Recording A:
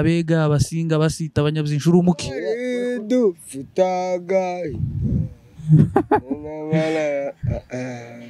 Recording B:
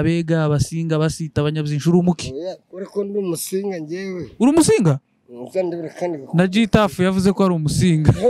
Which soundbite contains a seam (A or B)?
A